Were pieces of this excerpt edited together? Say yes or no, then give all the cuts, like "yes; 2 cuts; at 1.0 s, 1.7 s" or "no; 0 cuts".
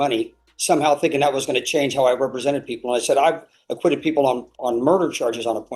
no; 0 cuts